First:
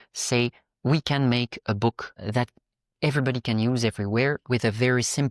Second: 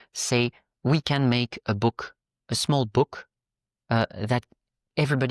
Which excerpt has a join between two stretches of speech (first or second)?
first